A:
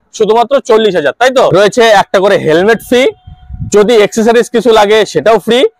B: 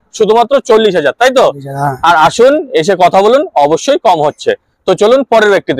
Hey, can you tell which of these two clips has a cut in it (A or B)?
A